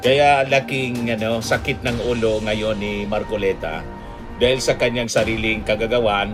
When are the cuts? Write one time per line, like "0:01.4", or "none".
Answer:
none